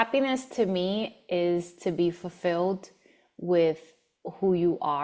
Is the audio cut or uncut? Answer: uncut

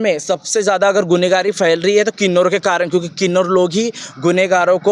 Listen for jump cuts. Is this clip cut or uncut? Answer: uncut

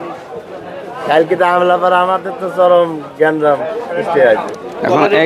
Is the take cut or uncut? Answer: uncut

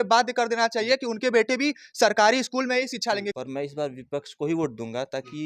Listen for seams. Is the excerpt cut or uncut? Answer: cut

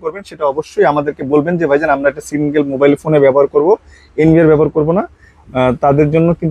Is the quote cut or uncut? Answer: uncut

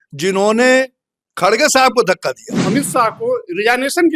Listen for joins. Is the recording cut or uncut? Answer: cut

